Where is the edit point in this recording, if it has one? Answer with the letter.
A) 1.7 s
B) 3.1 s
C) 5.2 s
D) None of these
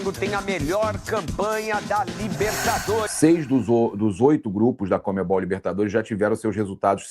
B